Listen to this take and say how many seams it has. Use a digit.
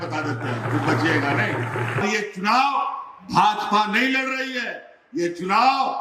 1